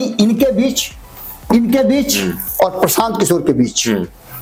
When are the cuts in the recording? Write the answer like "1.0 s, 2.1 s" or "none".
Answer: none